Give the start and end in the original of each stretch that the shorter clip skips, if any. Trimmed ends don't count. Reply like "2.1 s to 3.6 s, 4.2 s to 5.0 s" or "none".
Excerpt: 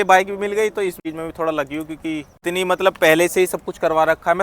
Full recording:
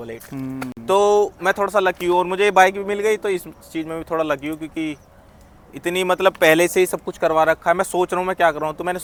3.5 s to 3.7 s, 5.0 s to 5.7 s

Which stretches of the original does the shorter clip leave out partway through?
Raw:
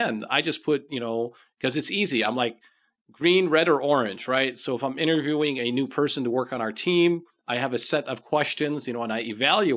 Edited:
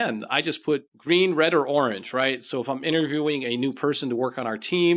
0.9 s to 3.0 s

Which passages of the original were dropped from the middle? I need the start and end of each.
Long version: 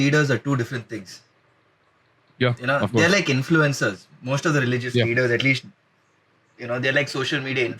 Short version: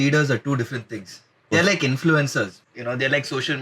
1.5 s to 3.0 s, 4.1 s to 6.5 s

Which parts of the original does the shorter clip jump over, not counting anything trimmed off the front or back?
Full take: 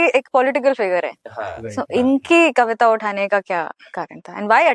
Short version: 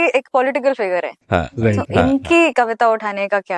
none

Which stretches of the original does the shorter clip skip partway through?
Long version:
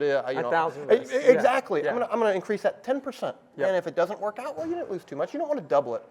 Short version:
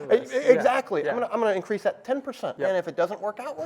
3.3 s to 3.5 s

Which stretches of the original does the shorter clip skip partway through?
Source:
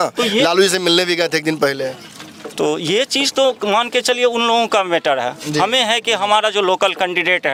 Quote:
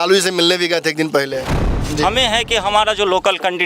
2.3 s to 5.4 s

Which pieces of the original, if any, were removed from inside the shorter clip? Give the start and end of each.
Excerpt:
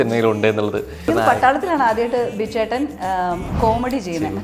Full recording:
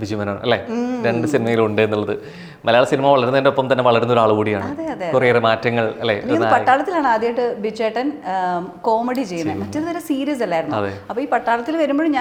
2.3 s to 6.2 s

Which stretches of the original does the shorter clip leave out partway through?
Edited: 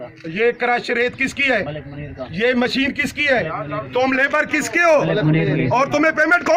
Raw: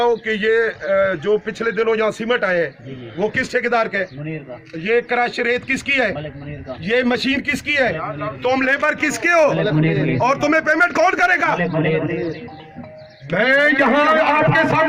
none

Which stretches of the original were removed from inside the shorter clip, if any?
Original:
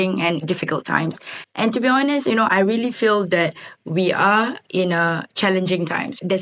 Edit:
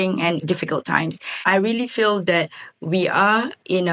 1.5 s to 2.5 s

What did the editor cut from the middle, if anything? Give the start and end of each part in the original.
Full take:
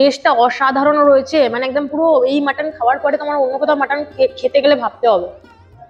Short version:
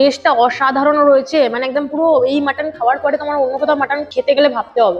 4.1 s to 4.4 s

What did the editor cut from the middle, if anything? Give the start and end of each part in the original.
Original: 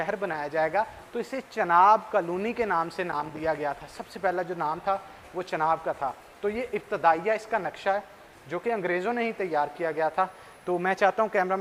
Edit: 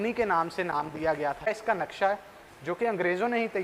3.9 s to 7.3 s

